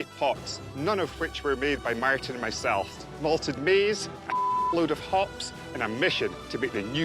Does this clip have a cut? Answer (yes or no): yes